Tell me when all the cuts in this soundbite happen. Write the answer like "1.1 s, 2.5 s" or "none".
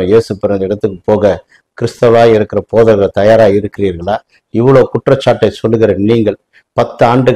none